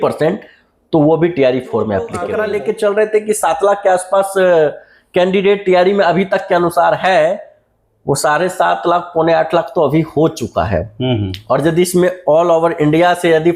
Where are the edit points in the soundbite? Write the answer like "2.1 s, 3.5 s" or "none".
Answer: 2.2 s